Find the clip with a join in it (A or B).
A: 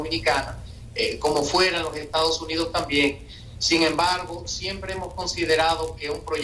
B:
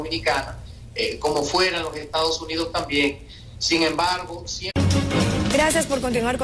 A